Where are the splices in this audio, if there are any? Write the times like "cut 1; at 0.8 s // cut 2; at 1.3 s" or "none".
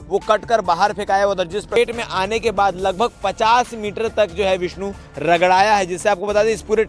cut 1; at 1.8 s